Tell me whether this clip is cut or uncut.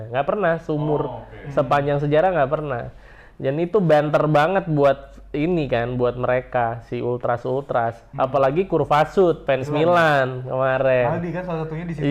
cut